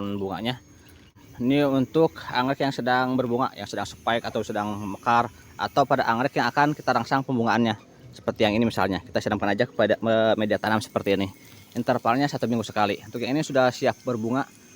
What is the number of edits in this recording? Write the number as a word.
one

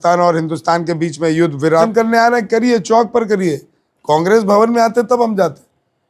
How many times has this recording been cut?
one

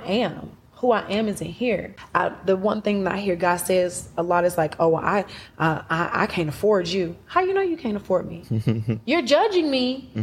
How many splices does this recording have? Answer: two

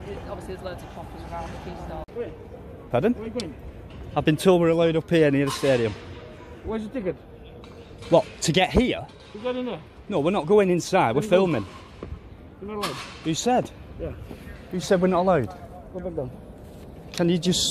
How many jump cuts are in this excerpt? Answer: one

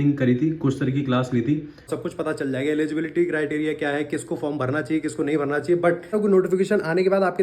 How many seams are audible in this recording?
two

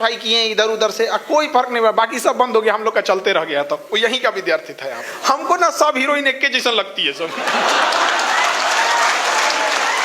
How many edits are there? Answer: one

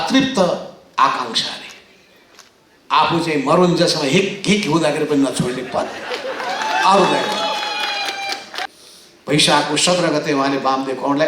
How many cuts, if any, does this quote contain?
one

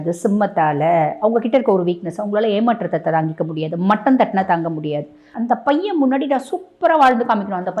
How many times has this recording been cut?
one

